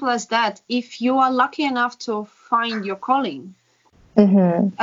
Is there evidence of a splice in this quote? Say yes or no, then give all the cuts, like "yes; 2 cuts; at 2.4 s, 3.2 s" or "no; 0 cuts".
no; 0 cuts